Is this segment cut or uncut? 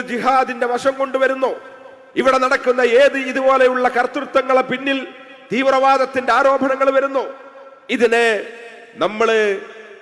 uncut